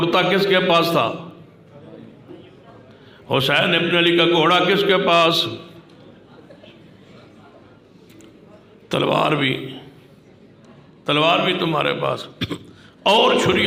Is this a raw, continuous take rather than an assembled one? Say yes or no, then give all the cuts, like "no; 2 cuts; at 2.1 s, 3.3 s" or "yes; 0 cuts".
yes; 0 cuts